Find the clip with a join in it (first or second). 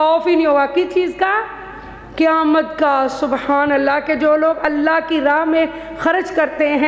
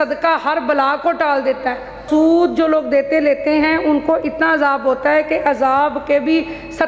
second